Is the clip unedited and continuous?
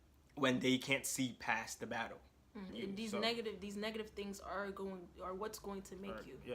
no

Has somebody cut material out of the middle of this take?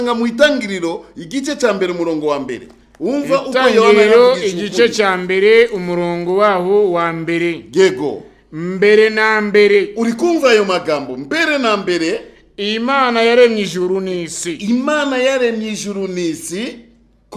no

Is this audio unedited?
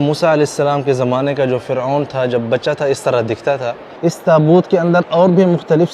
no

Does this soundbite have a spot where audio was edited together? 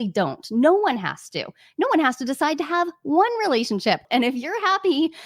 yes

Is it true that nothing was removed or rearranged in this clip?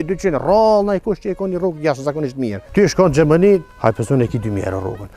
no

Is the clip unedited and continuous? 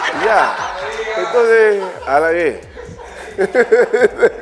yes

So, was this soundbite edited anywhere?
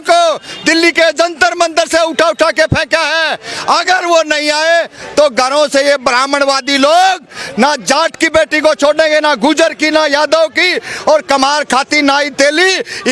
no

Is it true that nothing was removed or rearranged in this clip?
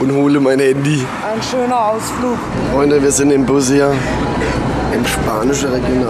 no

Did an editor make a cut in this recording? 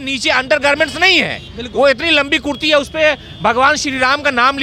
no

